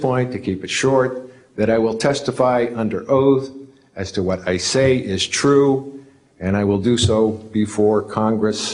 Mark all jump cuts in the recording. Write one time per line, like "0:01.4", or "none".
none